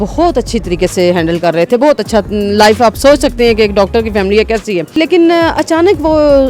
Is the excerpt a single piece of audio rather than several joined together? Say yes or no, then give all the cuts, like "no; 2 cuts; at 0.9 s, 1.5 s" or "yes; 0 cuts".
no; 1 cut; at 5.0 s